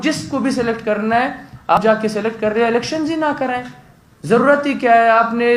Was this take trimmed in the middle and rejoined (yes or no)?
yes